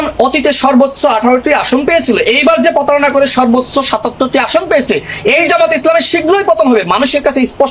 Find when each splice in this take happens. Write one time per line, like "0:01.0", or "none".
none